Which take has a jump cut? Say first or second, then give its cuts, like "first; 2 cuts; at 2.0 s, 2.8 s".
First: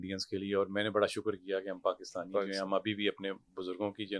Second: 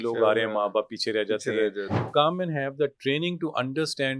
second; 1 cut; at 2.1 s